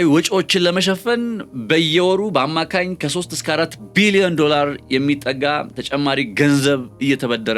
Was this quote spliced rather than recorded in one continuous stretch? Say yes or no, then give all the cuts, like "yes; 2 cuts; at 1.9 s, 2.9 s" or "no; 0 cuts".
no; 0 cuts